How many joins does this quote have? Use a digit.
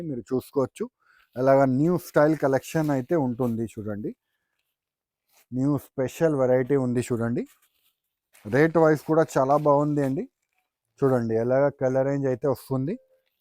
0